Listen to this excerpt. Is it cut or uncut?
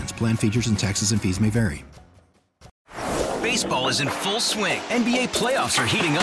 cut